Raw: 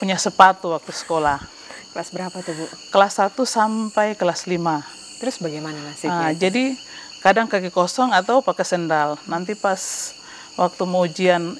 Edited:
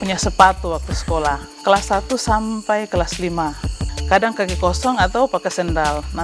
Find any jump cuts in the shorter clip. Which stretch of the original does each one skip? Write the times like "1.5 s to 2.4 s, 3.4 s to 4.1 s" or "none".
1.5 s to 2.8 s, 5.1 s to 6.9 s